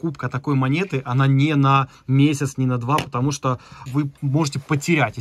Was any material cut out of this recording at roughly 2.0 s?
no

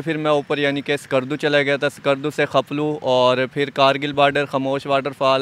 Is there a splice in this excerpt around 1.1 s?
no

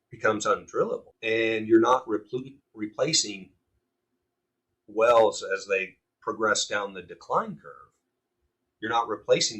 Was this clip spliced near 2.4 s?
no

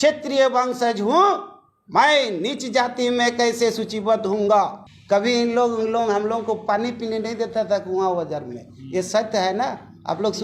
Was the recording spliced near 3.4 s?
no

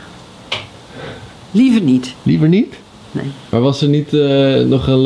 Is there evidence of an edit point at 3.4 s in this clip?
yes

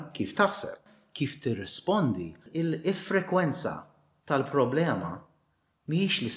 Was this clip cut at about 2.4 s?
yes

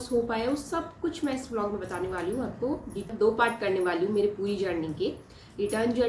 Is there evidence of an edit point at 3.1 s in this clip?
yes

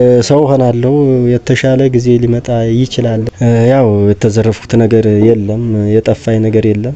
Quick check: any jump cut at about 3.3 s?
yes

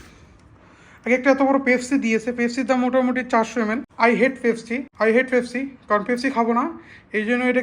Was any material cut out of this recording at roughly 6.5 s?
no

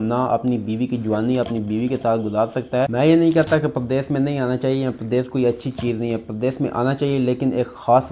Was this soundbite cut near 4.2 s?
no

